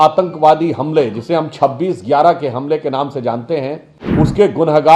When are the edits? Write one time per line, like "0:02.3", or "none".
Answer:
0:03.9